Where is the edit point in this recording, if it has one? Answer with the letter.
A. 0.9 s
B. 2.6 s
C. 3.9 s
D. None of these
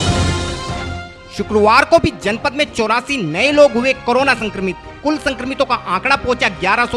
A